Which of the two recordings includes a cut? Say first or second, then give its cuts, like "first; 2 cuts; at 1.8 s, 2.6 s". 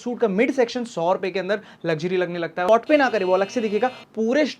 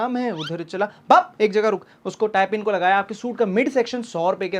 first; 1 cut; at 2.7 s